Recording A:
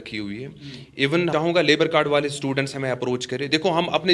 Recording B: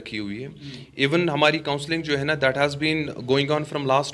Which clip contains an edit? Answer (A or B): A